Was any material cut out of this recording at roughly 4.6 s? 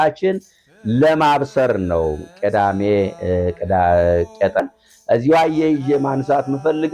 yes; 1 cut; at 4.6 s

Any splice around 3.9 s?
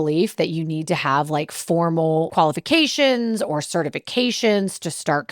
no; 1 cut; at 2.3 s

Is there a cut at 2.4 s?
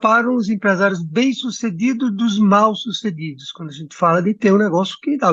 no; 0 cuts

